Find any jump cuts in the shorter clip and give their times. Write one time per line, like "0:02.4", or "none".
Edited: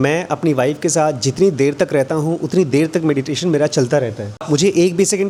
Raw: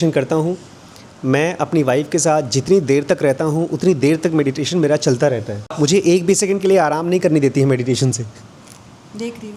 none